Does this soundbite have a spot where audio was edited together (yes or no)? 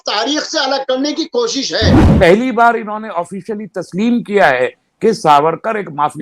yes